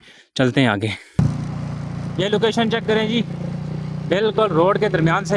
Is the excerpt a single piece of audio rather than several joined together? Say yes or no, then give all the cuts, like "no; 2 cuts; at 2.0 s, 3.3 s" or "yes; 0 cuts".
yes; 0 cuts